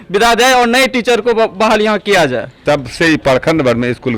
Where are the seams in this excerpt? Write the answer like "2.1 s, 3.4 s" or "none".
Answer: 2.5 s